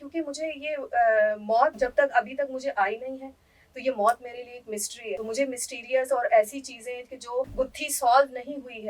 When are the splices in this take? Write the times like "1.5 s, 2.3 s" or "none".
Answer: none